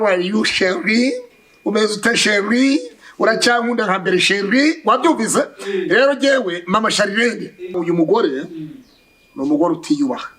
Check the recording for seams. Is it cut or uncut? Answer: cut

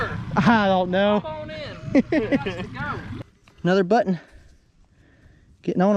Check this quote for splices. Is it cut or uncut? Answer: uncut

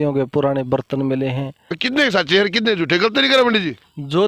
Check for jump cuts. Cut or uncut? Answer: cut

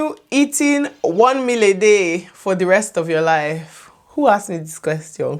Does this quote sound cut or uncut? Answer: uncut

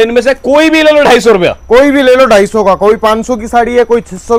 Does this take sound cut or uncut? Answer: uncut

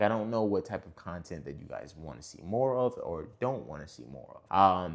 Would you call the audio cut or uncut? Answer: uncut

